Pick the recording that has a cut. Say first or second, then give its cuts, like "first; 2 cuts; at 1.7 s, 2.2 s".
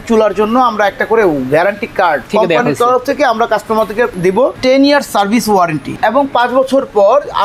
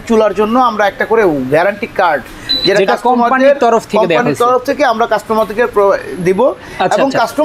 first; 3 cuts; at 2.3 s, 4.2 s, 6.0 s